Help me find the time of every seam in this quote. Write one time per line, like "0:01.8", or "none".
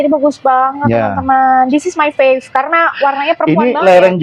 none